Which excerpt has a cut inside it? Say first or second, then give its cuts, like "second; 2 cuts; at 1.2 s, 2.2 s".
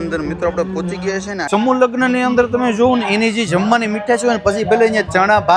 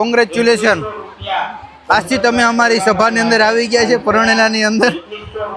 first; 1 cut; at 1.5 s